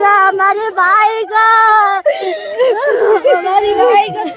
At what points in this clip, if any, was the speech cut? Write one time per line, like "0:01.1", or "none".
none